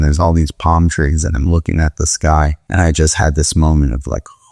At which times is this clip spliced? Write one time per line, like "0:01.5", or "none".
0:02.6